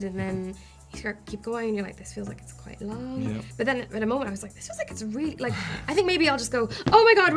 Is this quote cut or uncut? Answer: cut